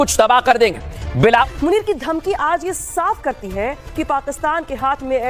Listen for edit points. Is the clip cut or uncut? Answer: uncut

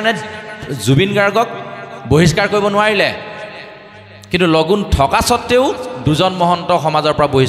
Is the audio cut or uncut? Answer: uncut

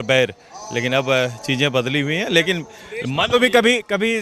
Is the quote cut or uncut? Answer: uncut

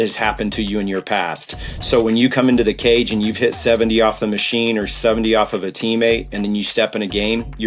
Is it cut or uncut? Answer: uncut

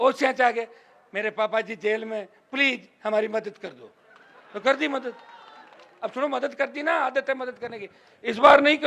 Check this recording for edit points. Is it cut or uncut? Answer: uncut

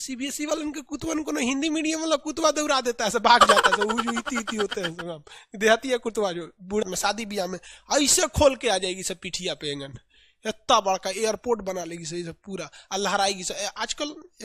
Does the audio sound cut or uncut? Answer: cut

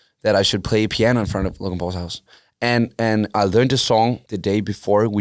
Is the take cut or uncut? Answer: cut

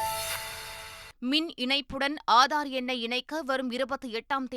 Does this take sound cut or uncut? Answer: cut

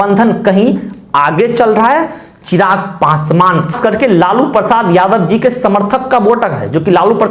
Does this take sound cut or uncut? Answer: cut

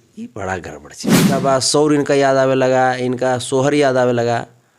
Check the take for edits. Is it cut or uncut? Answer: cut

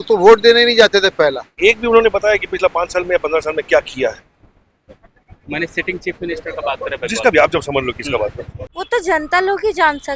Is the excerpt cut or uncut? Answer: cut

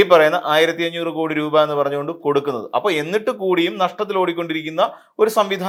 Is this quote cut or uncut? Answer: uncut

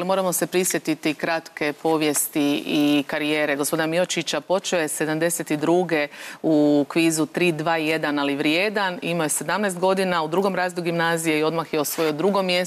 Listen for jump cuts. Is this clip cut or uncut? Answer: cut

